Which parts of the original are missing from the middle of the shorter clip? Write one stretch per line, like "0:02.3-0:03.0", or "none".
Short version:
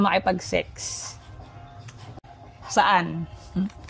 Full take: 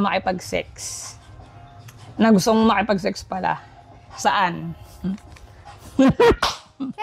0:02.1-0:03.6

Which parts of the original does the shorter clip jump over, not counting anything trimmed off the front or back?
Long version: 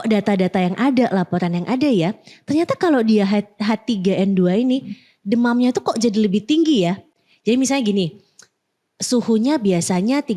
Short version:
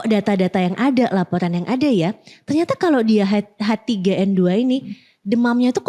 none

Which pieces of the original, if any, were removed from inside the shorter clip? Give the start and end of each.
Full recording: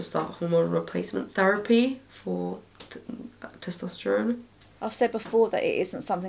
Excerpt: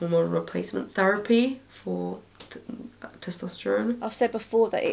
0:04.4-0:04.8

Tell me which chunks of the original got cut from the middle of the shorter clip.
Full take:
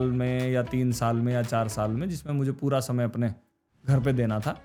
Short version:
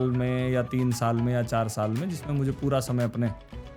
none

